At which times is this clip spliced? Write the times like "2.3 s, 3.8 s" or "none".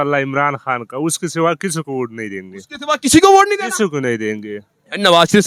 none